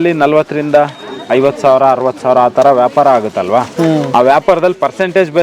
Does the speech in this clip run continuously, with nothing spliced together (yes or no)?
yes